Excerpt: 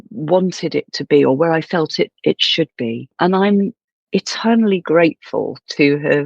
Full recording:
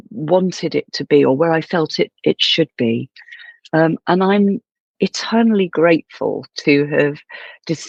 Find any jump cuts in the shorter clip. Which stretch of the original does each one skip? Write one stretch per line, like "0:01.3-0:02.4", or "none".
0:03.1-0:04.0